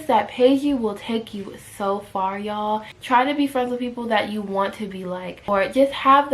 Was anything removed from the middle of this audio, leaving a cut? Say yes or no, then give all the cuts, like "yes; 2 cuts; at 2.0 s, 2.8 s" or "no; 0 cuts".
yes; 2 cuts; at 2.9 s, 5.3 s